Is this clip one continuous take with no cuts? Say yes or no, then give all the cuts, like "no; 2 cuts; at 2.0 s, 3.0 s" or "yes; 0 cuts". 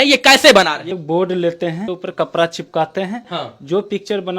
no; 3 cuts; at 0.9 s, 1.9 s, 3.3 s